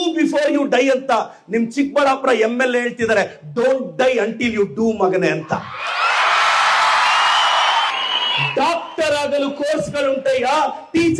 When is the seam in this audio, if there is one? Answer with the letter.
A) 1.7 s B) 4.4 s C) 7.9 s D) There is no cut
C